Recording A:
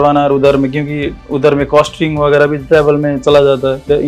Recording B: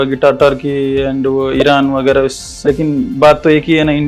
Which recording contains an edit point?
B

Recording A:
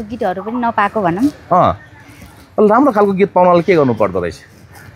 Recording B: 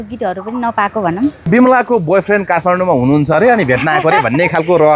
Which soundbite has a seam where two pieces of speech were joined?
B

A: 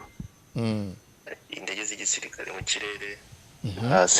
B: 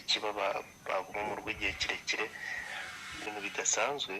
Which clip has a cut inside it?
B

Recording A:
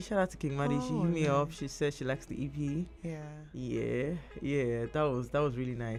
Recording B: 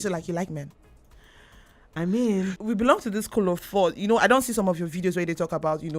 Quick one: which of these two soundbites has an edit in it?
B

